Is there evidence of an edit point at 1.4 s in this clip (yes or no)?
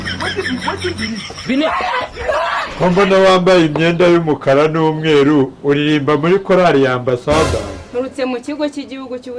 no